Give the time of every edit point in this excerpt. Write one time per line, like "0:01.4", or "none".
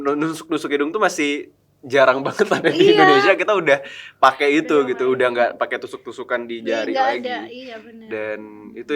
none